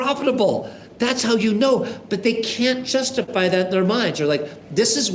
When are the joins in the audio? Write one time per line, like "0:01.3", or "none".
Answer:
none